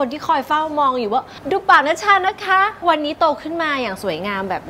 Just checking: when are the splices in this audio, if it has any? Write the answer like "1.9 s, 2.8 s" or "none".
1.4 s, 2.8 s